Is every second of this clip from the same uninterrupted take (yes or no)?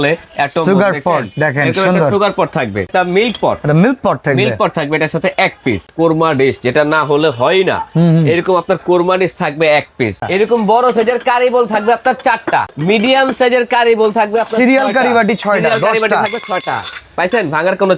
no